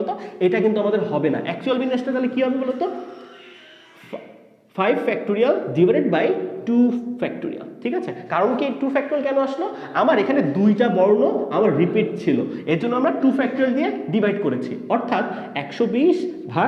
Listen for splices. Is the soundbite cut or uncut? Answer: uncut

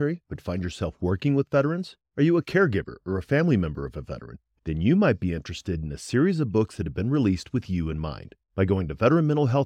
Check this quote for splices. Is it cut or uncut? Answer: uncut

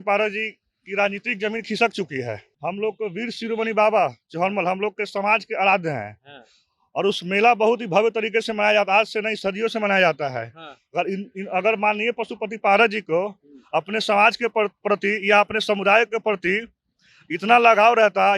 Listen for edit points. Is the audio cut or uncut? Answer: cut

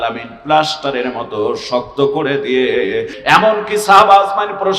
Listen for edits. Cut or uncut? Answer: cut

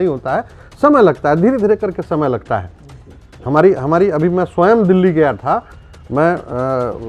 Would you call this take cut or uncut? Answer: uncut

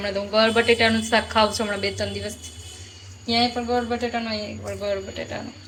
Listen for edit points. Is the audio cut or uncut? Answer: uncut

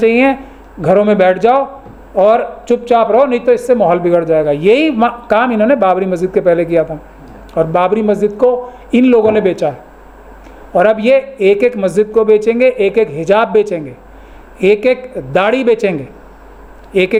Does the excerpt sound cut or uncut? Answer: uncut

